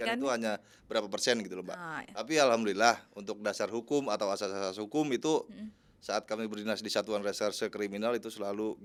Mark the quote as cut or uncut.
uncut